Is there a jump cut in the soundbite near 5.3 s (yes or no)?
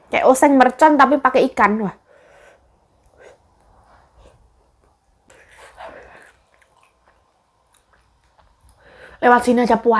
yes